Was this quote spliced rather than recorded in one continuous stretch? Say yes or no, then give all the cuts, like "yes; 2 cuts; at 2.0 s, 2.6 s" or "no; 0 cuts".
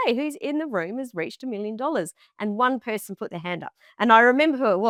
no; 0 cuts